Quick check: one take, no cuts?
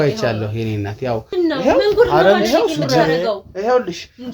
no; 1 cut; at 1.3 s

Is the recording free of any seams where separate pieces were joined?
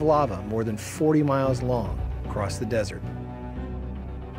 yes; 0 cuts

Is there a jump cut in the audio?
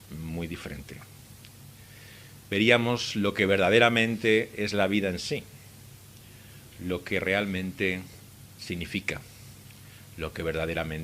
yes; 1 cut; at 6.8 s

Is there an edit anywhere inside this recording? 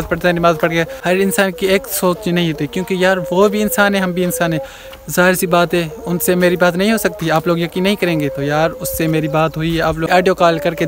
yes; 2 cuts; at 0.9 s, 10.1 s

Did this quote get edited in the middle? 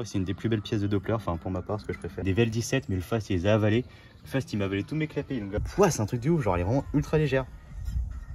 yes; 2 cuts; at 2.2 s, 5.6 s

